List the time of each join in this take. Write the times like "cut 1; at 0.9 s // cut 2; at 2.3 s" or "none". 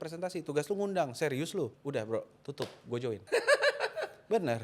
cut 1; at 1.8 s // cut 2; at 3.2 s